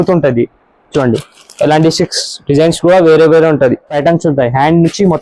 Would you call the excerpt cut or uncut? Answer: cut